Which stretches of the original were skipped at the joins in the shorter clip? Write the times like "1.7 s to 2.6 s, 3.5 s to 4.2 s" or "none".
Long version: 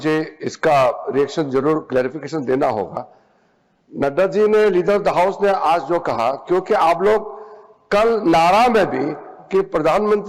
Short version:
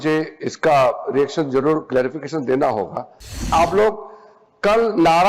3.5 s to 6.8 s